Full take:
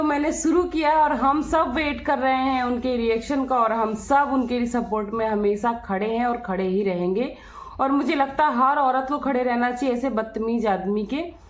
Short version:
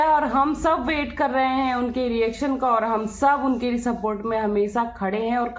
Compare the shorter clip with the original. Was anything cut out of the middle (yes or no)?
no